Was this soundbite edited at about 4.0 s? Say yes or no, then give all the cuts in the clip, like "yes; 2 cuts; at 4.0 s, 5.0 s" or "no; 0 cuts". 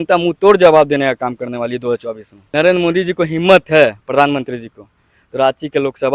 no; 1 cut; at 2.4 s